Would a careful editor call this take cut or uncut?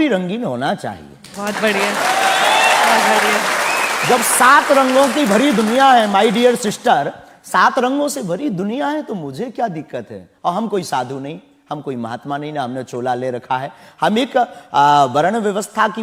uncut